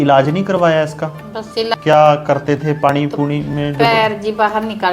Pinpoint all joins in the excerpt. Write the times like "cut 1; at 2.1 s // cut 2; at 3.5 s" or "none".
cut 1; at 1.7 s